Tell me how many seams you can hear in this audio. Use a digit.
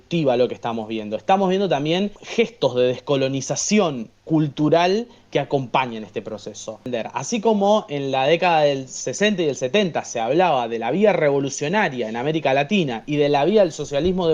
2